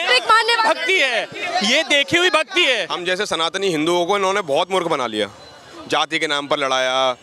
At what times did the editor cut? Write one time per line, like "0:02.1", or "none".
0:02.9